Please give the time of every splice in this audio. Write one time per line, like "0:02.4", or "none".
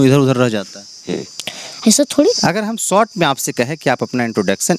0:02.3